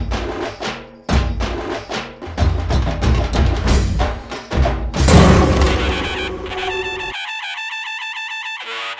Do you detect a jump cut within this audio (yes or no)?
yes